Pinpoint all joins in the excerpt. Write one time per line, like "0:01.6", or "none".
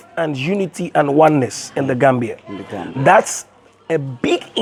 none